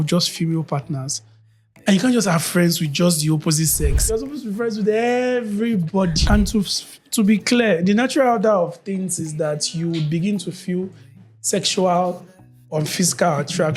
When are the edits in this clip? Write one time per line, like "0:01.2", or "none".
0:04.0
0:06.2